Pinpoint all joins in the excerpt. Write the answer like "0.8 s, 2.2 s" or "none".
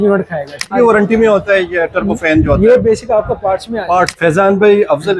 0.7 s, 4.1 s